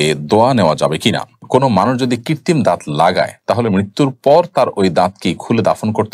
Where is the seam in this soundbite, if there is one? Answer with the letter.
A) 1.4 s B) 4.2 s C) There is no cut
A